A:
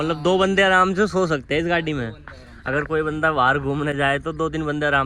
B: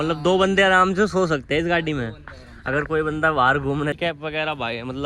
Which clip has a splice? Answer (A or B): B